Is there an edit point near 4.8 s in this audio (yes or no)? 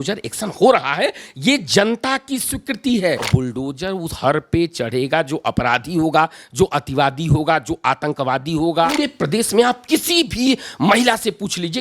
no